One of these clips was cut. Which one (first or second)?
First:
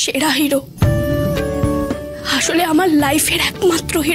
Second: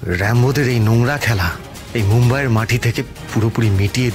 first